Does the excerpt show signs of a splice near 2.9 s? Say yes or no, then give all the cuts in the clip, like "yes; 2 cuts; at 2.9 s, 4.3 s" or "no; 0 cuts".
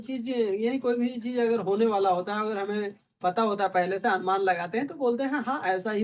no; 0 cuts